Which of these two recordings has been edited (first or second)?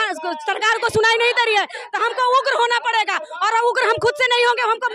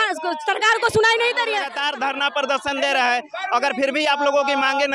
second